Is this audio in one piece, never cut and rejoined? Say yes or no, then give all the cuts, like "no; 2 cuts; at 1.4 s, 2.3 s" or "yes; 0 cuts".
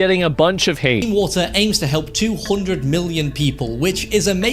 no; 1 cut; at 1.0 s